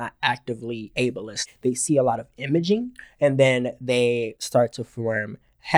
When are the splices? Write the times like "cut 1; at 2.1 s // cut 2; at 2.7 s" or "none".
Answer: cut 1; at 1.4 s // cut 2; at 4.4 s